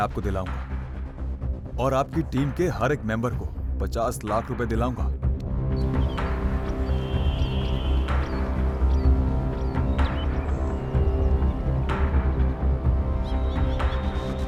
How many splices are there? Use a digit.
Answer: 0